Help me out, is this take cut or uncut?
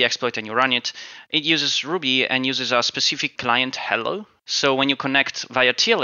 cut